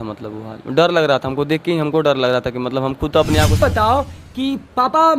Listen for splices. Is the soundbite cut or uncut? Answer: cut